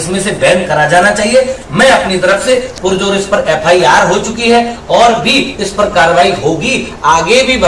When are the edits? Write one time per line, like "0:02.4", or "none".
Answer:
none